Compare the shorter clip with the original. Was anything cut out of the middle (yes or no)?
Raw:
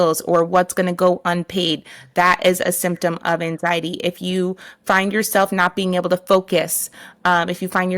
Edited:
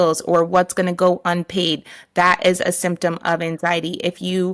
no